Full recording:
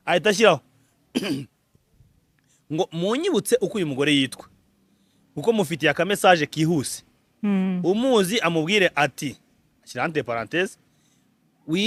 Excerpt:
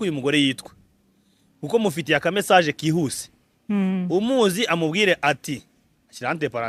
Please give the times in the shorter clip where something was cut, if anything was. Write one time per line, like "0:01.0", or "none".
none